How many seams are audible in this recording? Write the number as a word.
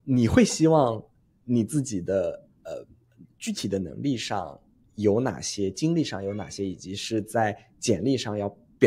zero